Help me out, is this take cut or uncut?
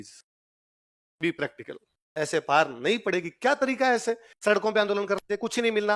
uncut